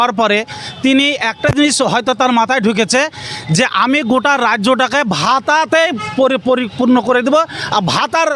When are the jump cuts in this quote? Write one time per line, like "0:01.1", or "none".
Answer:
none